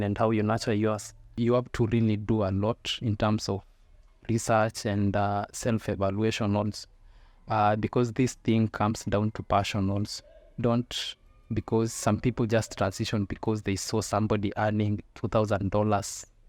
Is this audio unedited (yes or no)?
no